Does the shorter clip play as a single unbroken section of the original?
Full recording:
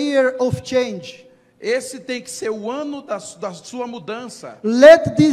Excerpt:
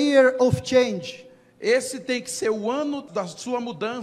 no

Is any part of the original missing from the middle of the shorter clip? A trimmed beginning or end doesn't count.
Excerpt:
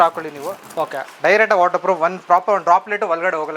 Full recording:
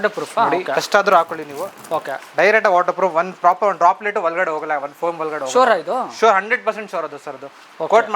no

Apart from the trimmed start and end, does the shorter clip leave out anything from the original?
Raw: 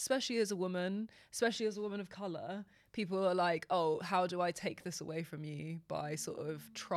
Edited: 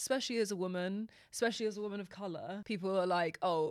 yes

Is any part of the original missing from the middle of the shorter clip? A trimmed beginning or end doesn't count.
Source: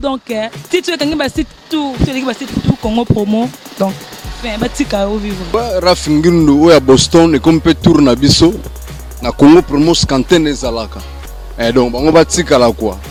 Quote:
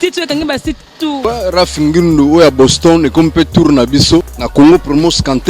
yes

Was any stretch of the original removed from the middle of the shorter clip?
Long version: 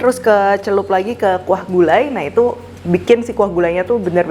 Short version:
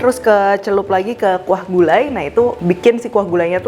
yes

